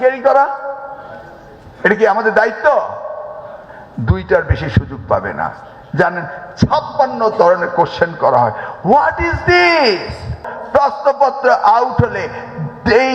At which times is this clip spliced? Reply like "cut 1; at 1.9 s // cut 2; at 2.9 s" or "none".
cut 1; at 10.5 s